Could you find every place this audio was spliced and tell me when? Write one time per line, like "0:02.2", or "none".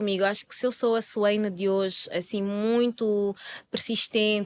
none